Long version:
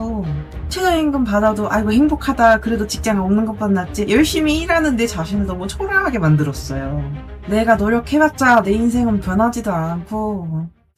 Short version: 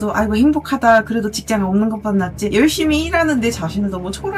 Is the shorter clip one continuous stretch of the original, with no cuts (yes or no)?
yes